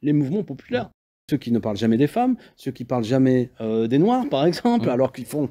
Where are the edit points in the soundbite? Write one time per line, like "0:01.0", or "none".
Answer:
0:01.1